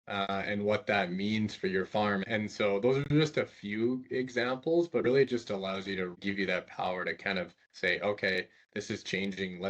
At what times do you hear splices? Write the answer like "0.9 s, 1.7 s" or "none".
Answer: 2.2 s, 6.2 s